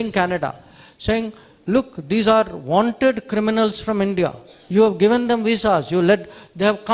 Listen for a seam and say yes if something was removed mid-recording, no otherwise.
no